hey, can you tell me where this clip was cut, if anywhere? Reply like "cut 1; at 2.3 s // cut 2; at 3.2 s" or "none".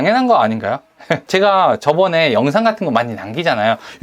cut 1; at 1.2 s